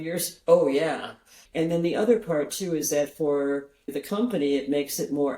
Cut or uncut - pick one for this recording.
cut